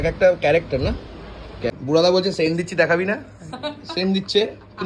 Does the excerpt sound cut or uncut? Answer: cut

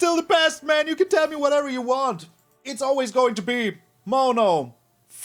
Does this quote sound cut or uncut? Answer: uncut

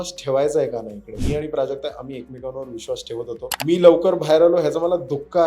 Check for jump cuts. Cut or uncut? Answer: cut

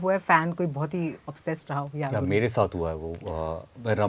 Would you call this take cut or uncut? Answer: uncut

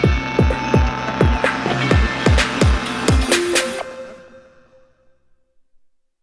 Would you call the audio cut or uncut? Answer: cut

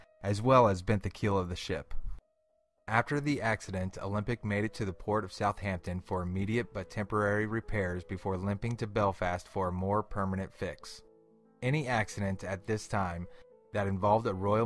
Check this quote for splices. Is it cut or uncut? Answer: uncut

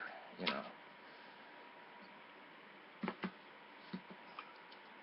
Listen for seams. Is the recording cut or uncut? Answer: uncut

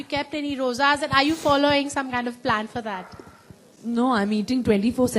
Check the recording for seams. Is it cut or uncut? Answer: uncut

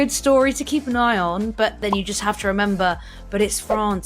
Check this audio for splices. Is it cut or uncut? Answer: cut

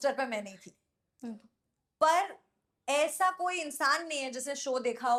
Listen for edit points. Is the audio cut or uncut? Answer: uncut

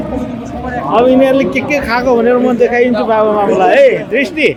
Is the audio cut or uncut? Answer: uncut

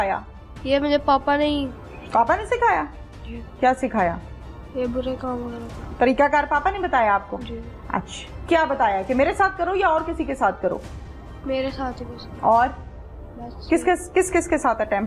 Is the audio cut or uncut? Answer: uncut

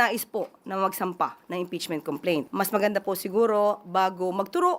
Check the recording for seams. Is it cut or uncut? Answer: cut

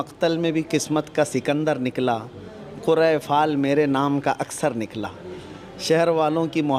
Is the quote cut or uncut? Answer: uncut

